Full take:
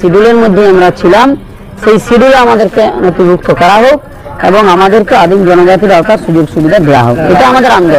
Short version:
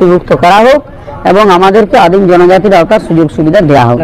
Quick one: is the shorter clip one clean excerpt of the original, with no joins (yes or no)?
yes